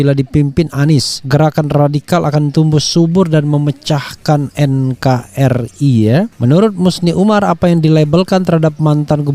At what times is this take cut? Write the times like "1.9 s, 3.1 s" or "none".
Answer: 1.2 s, 6.3 s